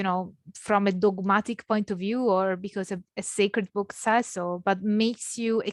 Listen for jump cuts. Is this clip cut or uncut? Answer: uncut